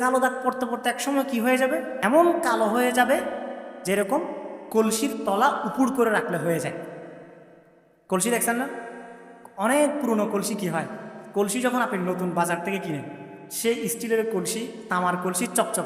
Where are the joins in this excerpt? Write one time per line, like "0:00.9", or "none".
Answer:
0:01.9

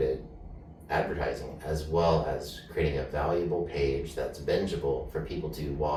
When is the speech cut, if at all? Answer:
none

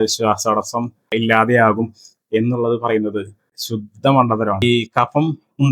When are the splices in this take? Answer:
0:04.6

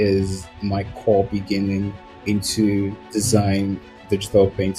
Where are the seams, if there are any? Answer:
0:03.0

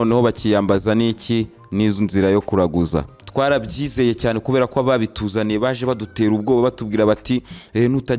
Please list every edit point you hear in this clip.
0:03.1

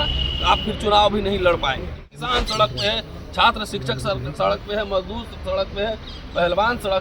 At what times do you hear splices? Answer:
0:02.2

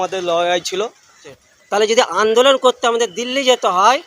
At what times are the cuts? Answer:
0:01.2

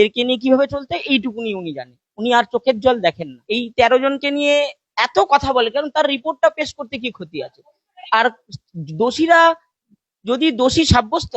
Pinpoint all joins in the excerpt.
0:03.3

